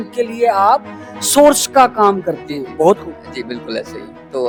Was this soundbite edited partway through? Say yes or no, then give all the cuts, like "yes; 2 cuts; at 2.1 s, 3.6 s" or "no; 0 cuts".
no; 0 cuts